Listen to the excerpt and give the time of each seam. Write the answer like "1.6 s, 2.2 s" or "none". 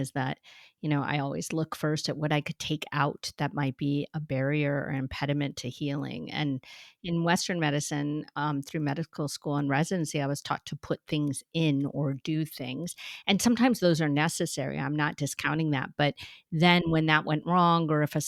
none